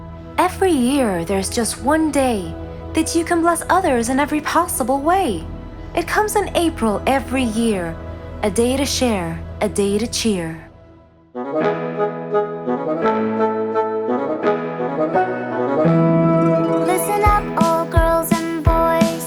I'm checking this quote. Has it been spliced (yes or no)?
no